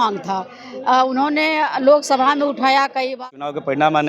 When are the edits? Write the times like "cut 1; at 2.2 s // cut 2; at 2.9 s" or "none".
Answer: cut 1; at 3.2 s